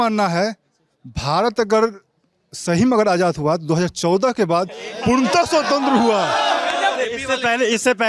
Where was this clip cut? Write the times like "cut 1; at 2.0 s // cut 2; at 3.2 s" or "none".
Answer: cut 1; at 7.0 s